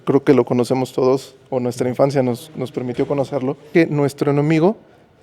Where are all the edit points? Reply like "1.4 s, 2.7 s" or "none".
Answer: 3.7 s